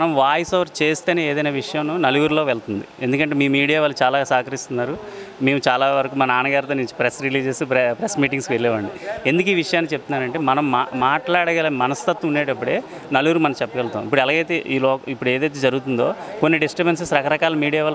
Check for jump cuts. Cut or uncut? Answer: uncut